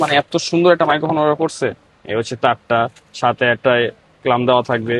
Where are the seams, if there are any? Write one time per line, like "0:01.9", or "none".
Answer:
0:01.9